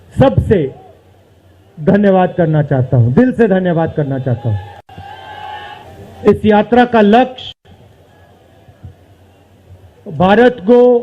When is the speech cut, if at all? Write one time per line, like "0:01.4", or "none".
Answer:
0:05.8